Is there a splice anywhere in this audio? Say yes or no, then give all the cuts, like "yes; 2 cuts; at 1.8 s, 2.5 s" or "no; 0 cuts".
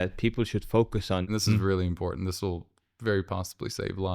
yes; 1 cut; at 1.2 s